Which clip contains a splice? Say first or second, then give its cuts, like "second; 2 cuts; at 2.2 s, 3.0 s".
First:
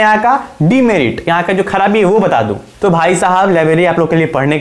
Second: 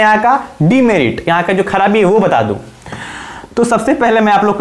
first; 1 cut; at 2.6 s